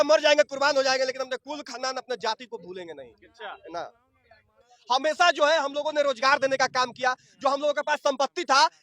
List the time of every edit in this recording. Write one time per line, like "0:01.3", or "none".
0:04.7